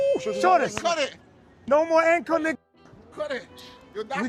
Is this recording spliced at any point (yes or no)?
no